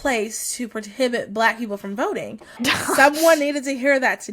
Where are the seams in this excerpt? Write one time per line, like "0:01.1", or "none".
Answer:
0:02.6